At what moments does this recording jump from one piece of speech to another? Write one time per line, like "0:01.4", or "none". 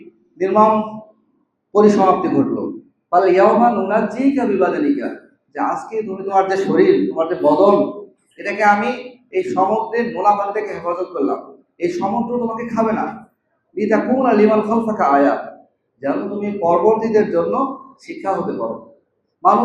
none